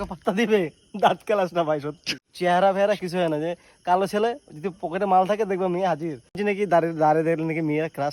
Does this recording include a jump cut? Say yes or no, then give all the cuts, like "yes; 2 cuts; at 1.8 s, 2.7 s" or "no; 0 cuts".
yes; 2 cuts; at 2.2 s, 6.4 s